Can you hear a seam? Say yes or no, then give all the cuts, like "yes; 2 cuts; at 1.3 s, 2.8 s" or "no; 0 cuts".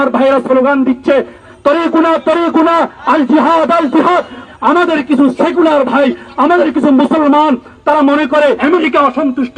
yes; 3 cuts; at 1.4 s, 4.4 s, 8.6 s